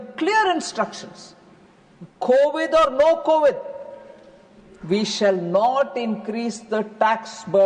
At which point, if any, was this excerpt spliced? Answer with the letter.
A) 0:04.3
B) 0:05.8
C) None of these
C